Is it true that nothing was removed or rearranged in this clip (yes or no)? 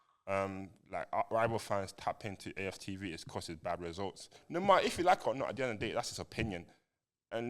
no